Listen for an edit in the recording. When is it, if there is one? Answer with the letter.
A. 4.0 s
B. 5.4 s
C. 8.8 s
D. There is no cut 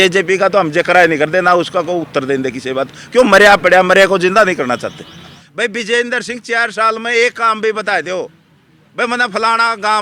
B